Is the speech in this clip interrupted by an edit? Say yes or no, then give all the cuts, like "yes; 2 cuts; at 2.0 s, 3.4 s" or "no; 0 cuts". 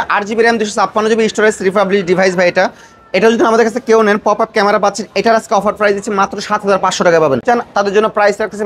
yes; 1 cut; at 7.4 s